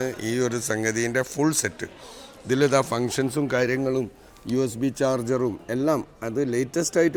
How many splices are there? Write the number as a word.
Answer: zero